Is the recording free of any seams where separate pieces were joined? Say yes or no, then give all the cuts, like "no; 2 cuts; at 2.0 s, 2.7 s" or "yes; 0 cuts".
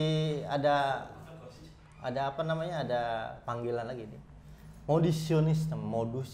yes; 0 cuts